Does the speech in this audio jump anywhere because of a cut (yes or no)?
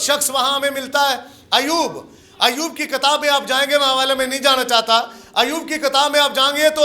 no